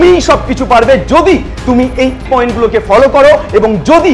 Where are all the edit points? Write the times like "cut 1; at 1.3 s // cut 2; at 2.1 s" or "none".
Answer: cut 1; at 2.2 s